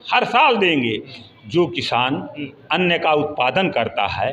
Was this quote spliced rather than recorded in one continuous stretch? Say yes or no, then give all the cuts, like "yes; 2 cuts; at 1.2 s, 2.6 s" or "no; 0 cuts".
yes; 1 cut; at 1.2 s